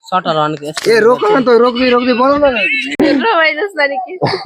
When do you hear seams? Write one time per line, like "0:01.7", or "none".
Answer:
0:02.8

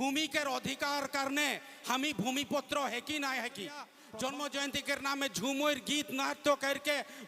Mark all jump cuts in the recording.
0:04.0

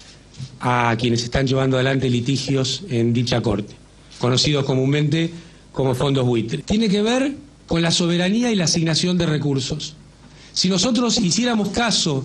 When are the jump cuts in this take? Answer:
none

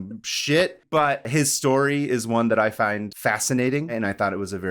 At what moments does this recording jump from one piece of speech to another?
0:01.2
0:03.1
0:03.9

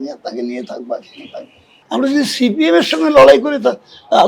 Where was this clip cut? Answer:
0:01.7

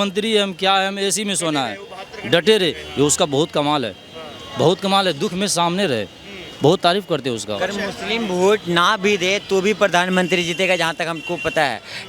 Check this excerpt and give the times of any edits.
0:07.5

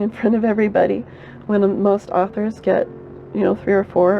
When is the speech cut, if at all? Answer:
none

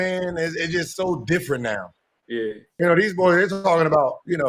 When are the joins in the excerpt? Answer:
none

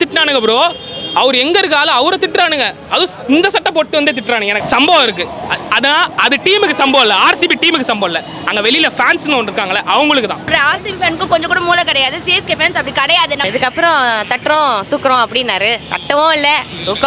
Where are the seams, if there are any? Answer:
0:04.6
0:10.5
0:13.4

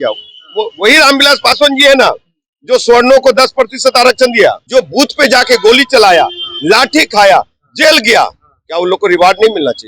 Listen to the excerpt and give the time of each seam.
0:04.6

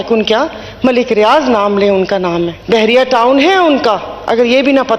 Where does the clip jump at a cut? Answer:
0:02.6

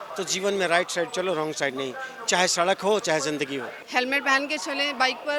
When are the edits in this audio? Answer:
0:03.8

